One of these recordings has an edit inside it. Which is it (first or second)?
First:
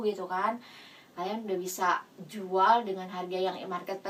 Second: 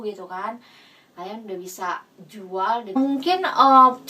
second